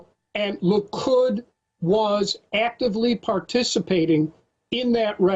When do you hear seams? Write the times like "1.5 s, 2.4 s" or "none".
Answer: 1.6 s